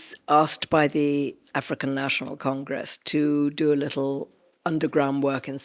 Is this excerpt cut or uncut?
uncut